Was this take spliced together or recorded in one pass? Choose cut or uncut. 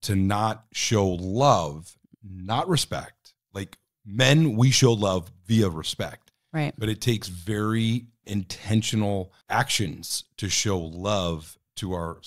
cut